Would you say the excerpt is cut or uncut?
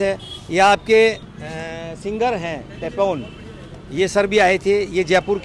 uncut